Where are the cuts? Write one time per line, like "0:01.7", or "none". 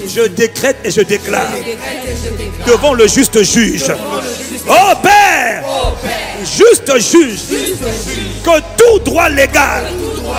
none